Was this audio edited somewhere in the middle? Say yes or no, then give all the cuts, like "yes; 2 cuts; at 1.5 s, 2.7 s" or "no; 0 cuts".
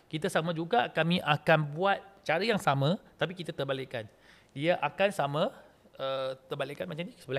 no; 0 cuts